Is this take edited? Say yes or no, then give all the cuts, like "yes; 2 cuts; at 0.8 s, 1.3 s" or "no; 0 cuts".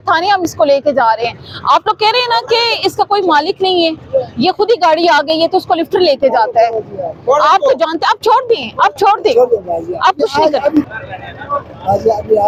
no; 0 cuts